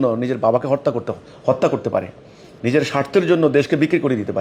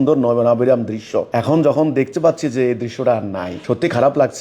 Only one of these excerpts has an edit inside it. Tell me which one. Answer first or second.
second